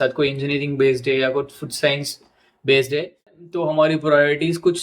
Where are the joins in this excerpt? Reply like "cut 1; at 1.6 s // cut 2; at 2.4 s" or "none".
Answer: cut 1; at 3.3 s